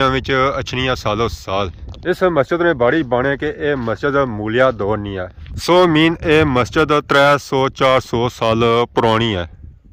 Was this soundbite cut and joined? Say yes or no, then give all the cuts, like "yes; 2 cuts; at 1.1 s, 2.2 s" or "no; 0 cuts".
no; 0 cuts